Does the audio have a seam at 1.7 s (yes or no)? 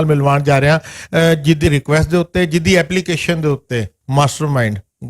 yes